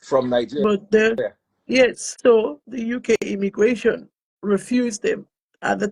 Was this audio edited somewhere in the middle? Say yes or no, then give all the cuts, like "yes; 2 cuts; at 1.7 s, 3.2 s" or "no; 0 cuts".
yes; 1 cut; at 2.1 s